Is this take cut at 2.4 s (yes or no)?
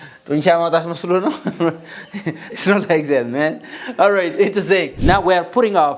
no